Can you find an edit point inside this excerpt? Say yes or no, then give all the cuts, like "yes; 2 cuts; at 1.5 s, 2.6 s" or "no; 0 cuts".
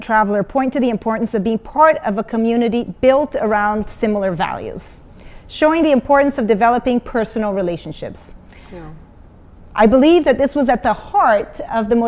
no; 0 cuts